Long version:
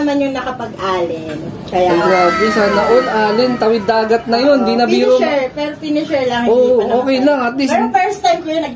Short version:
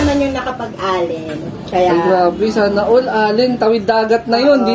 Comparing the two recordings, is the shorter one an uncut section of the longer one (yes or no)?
yes